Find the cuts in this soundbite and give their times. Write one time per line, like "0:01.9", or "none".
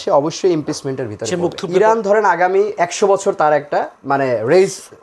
0:01.6

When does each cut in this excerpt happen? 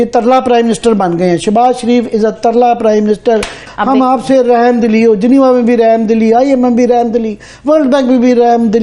0:03.5

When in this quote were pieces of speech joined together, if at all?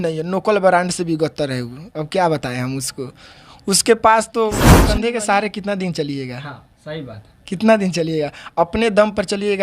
0:04.9

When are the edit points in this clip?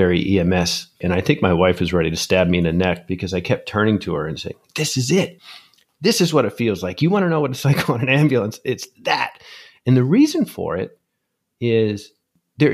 0:01.0

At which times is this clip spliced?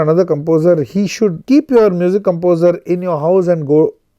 0:01.4

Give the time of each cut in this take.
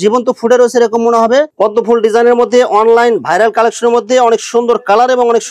0:01.5

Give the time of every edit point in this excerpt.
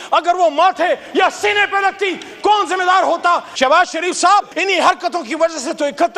0:03.5
0:04.5

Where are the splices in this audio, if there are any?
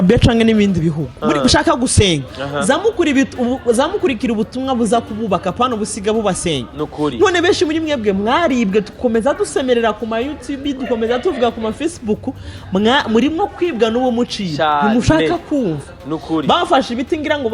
none

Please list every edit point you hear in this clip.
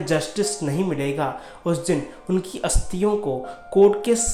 none

